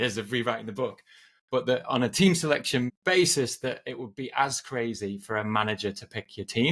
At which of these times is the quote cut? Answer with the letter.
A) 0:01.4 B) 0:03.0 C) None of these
B